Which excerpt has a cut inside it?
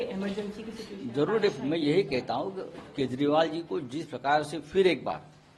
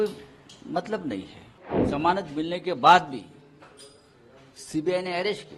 second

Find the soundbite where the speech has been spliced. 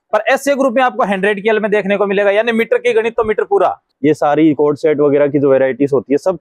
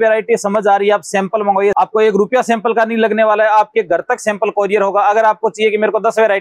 first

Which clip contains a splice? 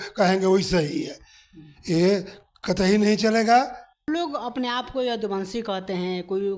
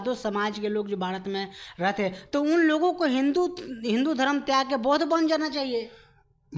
first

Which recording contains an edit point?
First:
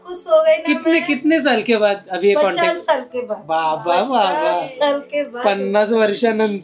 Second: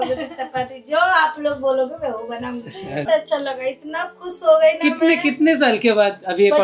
second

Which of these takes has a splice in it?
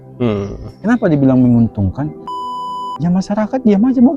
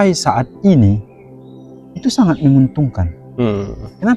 first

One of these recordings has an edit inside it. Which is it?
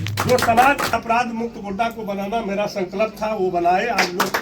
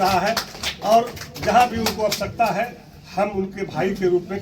first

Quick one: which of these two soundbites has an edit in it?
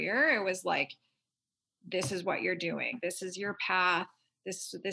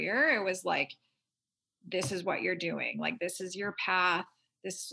first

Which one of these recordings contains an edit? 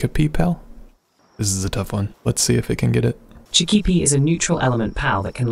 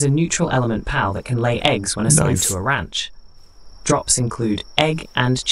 first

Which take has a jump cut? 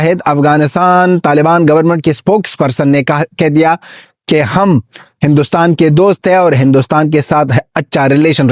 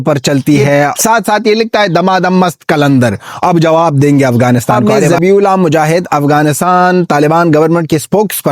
second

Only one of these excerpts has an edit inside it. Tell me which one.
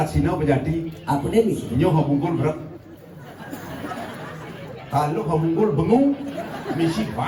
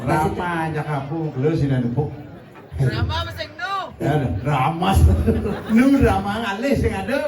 second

